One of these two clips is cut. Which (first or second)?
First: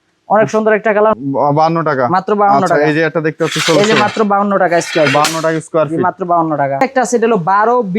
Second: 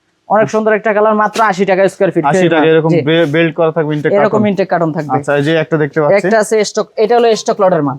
first